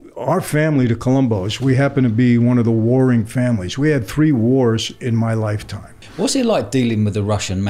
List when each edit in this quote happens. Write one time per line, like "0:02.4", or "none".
0:06.0